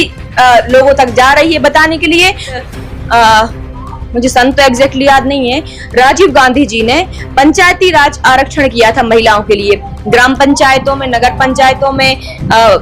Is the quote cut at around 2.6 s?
yes; 1 cut; at 2.6 s

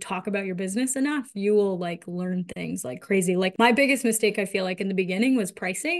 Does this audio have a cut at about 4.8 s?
no; 1 cut; at 3.5 s

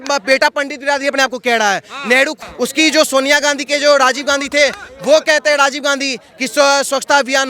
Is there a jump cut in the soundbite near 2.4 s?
yes; 1 cut; at 2.4 s

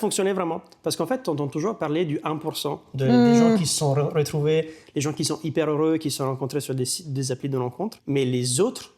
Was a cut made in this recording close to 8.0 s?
yes; 1 cut; at 8.0 s

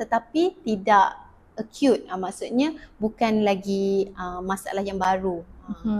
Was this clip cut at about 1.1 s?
no; 0 cuts

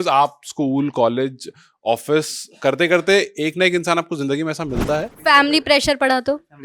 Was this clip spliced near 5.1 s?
yes; 1 cut; at 5.1 s

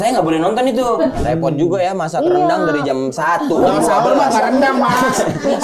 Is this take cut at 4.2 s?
no; 1 cut; at 1.2 s

